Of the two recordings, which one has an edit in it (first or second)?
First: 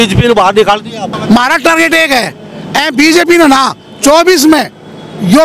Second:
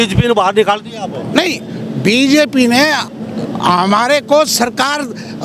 first